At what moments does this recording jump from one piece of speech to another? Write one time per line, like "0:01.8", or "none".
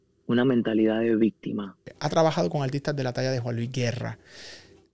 0:01.9